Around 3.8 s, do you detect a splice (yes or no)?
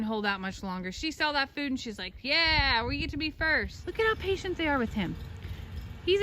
yes